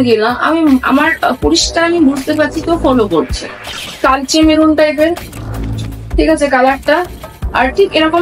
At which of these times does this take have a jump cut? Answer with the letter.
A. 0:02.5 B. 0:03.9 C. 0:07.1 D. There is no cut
B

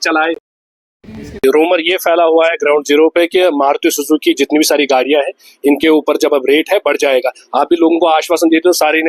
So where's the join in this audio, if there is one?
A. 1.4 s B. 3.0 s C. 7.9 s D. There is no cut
A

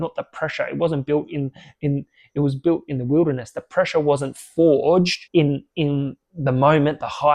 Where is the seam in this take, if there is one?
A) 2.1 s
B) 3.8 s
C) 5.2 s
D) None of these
C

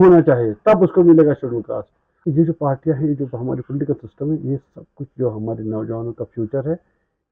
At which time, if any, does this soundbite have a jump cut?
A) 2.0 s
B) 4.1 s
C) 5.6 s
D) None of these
A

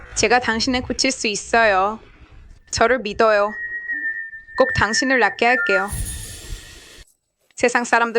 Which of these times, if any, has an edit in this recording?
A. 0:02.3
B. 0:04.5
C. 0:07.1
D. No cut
C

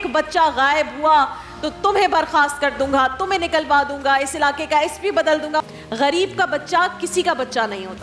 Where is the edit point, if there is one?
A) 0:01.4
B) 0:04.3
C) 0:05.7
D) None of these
C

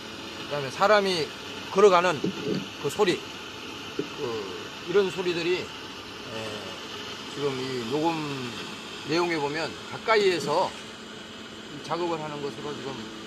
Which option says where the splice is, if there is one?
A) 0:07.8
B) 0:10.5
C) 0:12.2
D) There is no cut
D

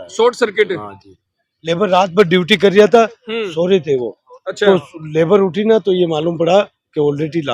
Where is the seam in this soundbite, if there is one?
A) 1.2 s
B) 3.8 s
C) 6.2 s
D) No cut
D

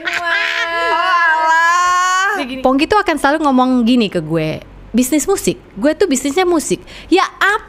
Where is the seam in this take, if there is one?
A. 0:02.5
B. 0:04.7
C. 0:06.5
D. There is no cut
A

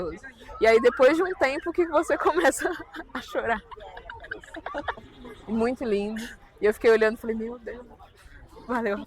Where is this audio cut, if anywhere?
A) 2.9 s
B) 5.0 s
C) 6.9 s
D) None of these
B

